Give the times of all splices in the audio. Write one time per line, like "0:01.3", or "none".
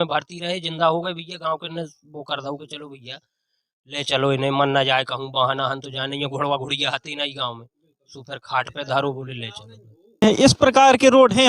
0:10.2